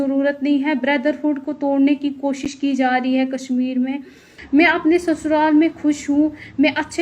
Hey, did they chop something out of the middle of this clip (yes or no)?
yes